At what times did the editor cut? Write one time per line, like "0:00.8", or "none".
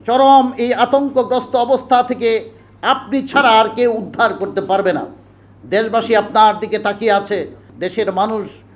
0:07.7

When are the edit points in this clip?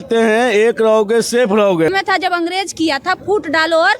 0:01.9

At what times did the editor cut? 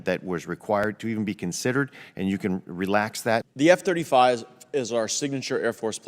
0:03.5

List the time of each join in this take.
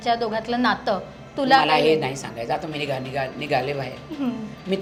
none

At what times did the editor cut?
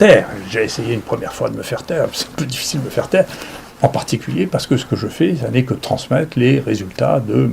none

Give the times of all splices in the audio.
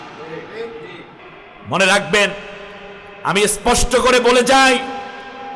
0:01.3

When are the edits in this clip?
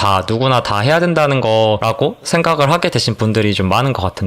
0:01.8

